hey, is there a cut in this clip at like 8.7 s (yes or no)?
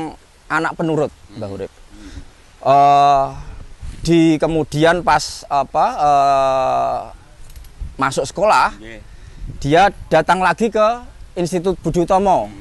no